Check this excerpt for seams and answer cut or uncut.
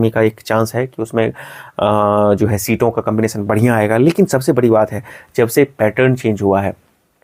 uncut